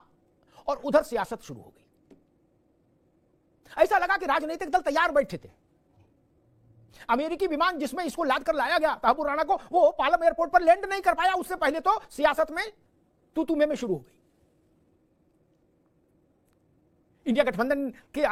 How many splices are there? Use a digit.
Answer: 0